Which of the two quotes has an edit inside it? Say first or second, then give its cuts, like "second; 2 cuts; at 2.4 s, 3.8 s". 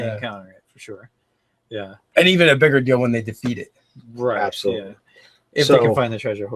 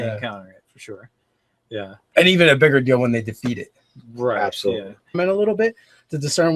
first; 1 cut; at 5.0 s